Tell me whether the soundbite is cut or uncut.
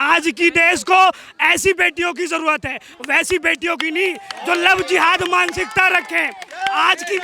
uncut